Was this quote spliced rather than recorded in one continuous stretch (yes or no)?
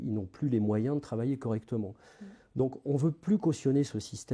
no